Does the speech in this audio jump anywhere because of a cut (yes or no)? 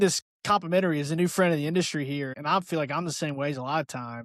yes